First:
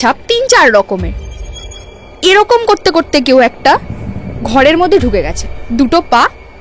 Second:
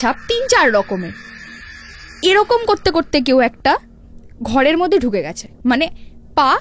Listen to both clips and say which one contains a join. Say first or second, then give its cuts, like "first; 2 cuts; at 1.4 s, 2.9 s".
first; 1 cut; at 5.5 s